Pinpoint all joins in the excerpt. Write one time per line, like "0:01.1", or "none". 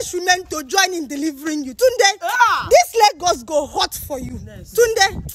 none